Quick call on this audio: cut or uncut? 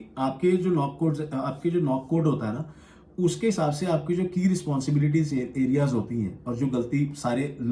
uncut